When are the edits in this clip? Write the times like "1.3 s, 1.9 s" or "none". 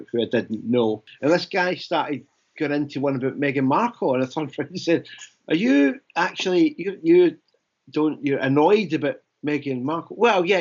1.1 s